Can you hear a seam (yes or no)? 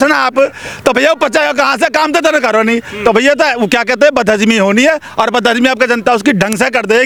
no